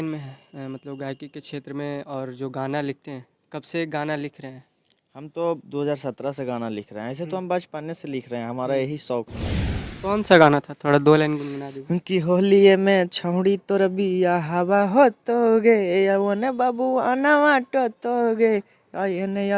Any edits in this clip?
yes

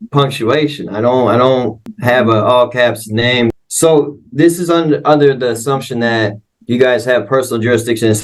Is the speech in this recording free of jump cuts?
no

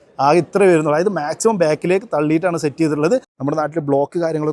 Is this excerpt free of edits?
no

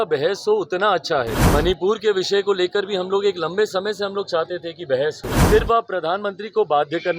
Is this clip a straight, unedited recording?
no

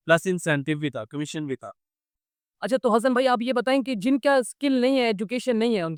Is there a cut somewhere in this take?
no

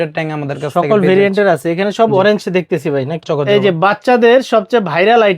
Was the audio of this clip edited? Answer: yes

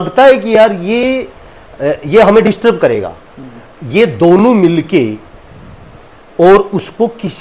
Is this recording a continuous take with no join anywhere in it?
yes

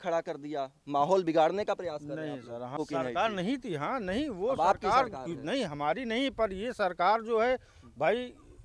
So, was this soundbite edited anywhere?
yes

